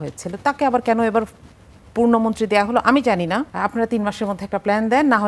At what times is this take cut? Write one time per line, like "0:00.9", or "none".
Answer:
0:03.5

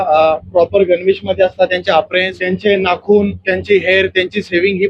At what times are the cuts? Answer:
0:02.4

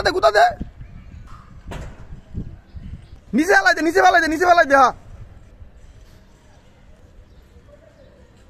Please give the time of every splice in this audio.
0:03.2
0:05.4
0:07.0

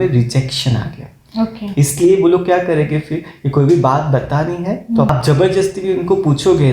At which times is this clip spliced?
0:05.1

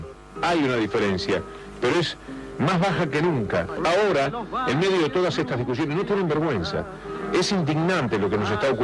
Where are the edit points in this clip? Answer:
0:03.7

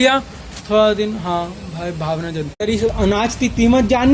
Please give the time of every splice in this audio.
0:02.3

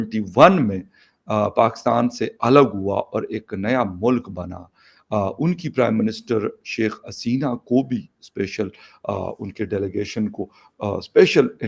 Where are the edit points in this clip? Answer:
none

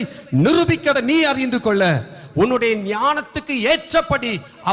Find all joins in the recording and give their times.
0:00.9

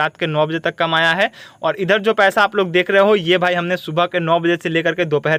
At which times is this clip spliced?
none

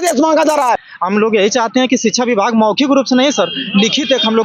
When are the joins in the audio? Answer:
0:00.9

